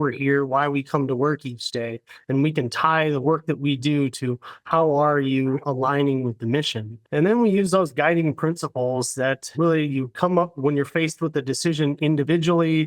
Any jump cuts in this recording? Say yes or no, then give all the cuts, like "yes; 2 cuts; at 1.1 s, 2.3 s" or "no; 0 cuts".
yes; 1 cut; at 9.5 s